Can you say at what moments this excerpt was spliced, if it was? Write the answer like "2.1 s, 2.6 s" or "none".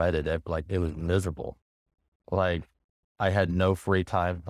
none